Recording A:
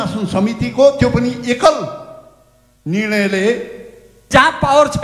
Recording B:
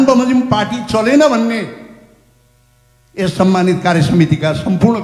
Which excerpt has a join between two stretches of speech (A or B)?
A